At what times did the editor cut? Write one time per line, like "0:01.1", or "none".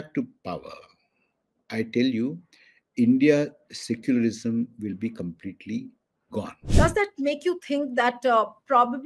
0:06.6